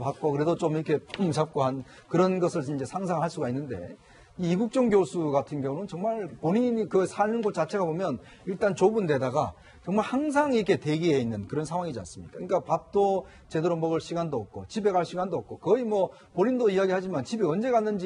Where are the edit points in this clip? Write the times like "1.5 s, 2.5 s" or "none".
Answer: none